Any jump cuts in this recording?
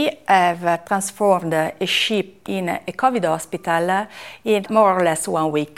yes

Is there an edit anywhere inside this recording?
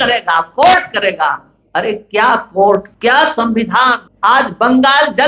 yes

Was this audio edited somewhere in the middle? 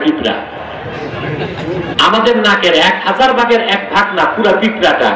yes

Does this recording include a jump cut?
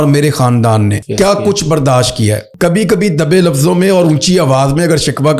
yes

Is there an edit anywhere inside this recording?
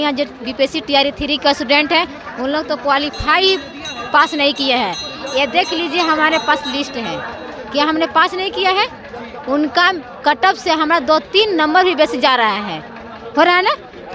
no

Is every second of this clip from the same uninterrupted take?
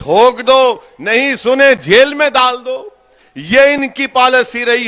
yes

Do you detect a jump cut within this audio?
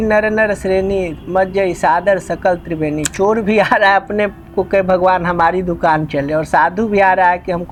no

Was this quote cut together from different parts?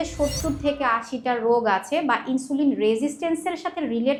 no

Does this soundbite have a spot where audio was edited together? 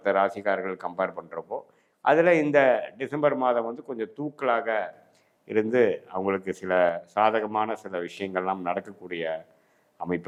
no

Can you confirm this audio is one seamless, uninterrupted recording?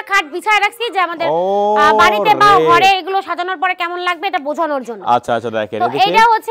yes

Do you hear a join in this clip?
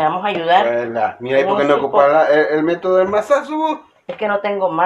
no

